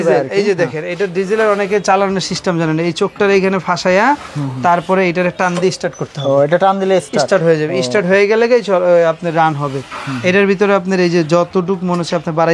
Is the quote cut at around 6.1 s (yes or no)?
no